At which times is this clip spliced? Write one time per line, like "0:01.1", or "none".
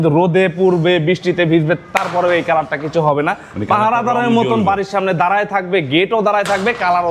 none